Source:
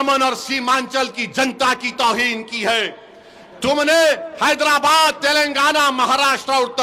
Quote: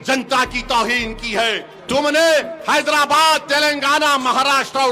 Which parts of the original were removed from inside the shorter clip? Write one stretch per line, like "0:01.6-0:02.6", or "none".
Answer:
0:03.0-0:03.4